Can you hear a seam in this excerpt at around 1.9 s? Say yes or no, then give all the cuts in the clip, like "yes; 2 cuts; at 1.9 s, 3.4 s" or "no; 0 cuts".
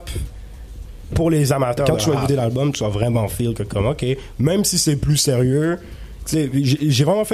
yes; 1 cut; at 1.9 s